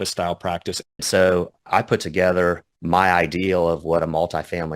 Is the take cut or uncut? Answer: cut